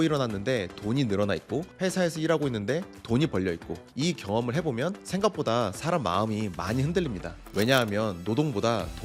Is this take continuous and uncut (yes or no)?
yes